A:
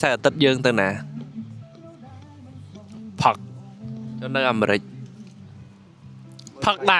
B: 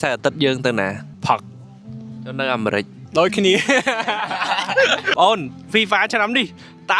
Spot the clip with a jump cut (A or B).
B